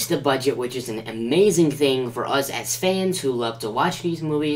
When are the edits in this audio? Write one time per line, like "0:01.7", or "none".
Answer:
none